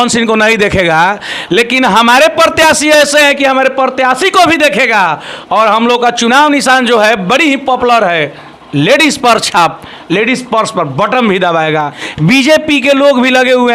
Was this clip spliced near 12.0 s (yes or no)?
yes